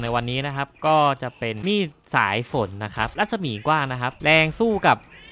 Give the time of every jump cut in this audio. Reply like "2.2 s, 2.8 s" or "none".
1.6 s, 3.1 s, 4.2 s